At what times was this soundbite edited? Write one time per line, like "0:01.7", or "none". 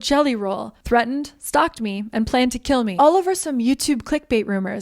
0:02.9